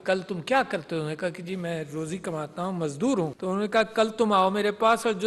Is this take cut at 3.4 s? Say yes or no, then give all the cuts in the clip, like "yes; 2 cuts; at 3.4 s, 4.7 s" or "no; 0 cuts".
yes; 1 cut; at 3.4 s